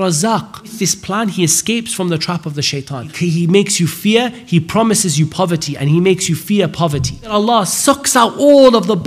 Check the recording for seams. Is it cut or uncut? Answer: cut